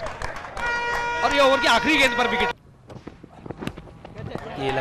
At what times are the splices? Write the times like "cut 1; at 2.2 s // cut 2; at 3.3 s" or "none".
cut 1; at 2.6 s